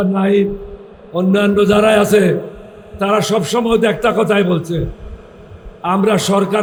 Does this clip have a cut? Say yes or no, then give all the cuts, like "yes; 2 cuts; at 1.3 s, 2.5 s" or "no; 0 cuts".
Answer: no; 0 cuts